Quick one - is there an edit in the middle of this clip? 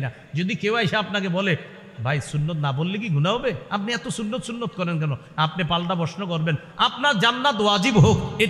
no; 0 cuts

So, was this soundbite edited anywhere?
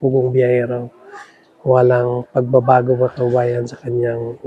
no; 0 cuts

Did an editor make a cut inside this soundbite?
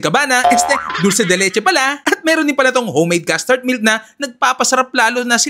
no; 0 cuts

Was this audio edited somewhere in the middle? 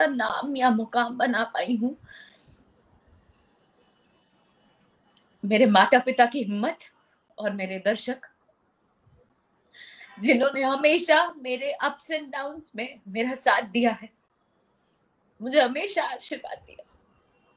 no; 0 cuts

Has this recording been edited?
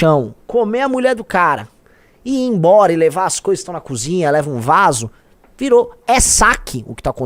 no; 0 cuts

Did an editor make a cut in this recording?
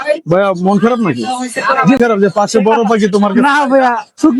yes; 1 cut; at 2.0 s

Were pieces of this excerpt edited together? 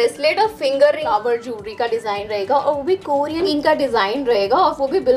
yes; 2 cuts; at 1.0 s, 3.5 s

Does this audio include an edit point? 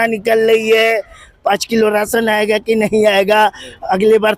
no; 0 cuts

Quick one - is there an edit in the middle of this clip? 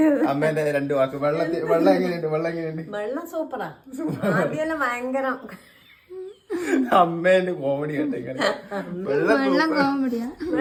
no; 0 cuts

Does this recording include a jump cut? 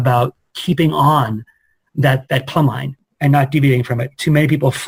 no; 0 cuts

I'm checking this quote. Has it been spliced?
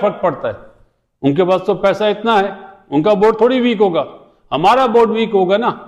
no; 0 cuts

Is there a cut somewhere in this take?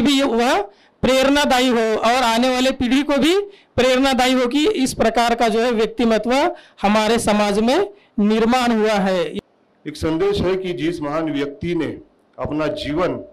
yes; 1 cut; at 9.4 s

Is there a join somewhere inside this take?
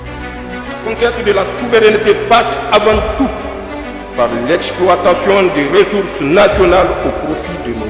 no; 0 cuts

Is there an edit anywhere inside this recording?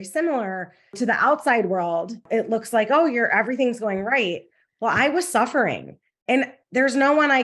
yes; 2 cuts; at 1.0 s, 2.2 s

